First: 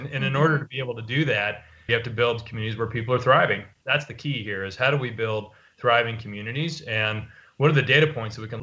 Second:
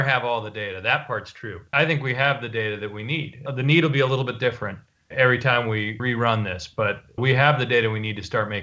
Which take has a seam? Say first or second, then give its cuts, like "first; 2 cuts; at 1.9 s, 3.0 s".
second; 1 cut; at 6.0 s